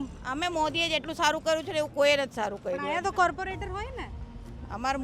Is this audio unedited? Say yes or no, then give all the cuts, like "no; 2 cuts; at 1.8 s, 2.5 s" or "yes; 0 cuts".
yes; 0 cuts